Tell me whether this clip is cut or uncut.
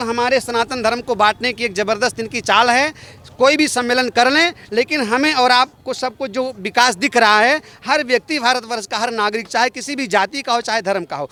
uncut